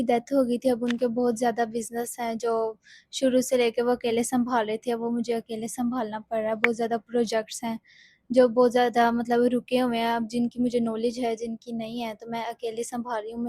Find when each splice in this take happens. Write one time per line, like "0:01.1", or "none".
none